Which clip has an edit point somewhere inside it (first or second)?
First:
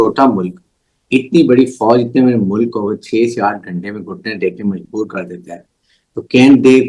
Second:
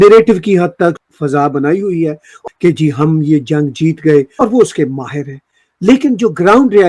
second